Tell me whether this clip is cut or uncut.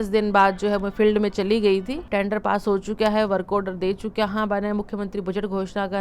cut